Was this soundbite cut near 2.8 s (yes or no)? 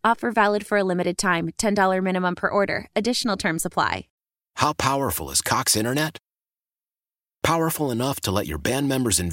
no